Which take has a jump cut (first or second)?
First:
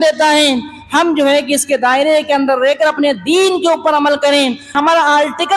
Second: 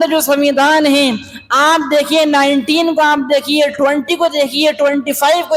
first